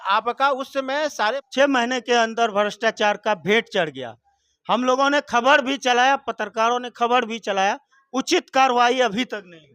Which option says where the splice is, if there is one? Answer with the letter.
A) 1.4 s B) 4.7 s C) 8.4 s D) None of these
A